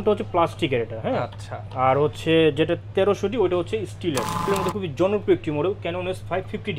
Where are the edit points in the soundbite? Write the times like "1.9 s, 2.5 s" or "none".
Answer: 4.5 s